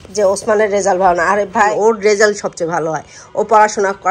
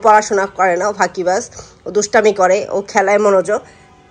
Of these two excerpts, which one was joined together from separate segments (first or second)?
first